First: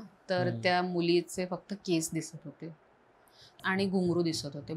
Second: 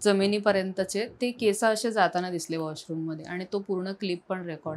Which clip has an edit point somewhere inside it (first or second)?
first